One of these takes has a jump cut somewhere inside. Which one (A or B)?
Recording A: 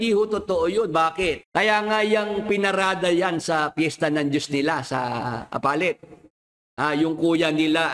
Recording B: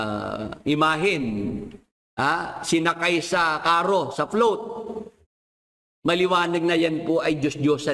A